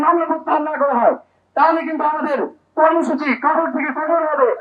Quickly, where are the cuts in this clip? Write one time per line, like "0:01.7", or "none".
none